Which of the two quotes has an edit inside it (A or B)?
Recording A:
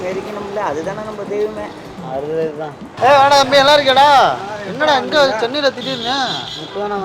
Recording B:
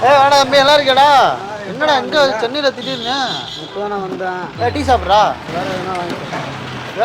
B